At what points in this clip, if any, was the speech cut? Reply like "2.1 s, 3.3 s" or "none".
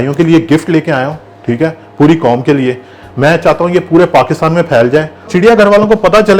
5.3 s